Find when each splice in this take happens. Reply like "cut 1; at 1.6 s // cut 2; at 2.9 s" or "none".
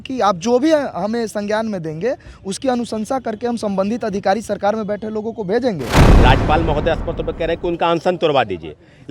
cut 1; at 6.1 s